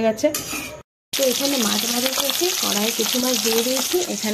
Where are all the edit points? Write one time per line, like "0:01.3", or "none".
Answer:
0:00.9